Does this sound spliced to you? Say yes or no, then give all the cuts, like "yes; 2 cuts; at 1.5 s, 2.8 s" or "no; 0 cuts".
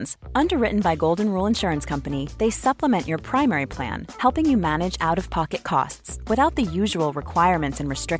no; 0 cuts